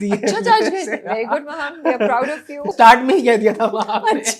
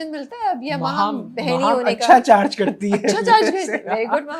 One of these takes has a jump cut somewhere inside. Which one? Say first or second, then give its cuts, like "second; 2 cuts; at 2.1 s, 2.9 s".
first; 1 cut; at 2.7 s